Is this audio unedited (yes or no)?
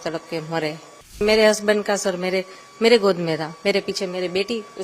no